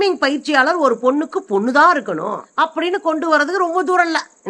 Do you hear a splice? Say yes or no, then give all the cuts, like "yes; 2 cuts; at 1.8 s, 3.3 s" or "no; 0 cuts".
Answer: yes; 1 cut; at 2.5 s